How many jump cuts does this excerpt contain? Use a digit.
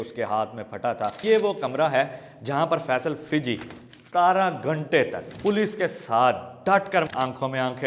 3